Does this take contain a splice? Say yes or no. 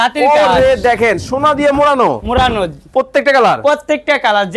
no